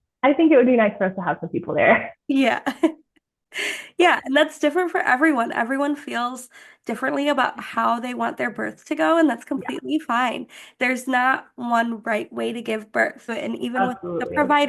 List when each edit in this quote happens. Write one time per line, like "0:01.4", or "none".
0:13.3